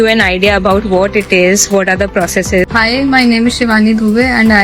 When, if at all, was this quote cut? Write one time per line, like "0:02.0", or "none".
0:02.7